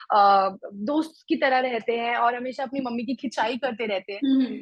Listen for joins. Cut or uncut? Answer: uncut